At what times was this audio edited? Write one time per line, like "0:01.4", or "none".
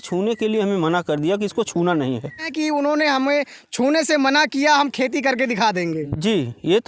0:02.5